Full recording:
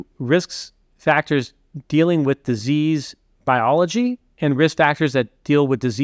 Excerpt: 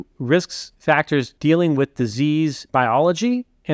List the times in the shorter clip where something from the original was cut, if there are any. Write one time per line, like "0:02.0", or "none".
0:01.0
0:02.6